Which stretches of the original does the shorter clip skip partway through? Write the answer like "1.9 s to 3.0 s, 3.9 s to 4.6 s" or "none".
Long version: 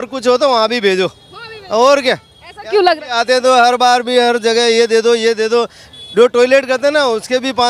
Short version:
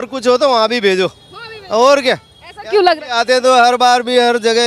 none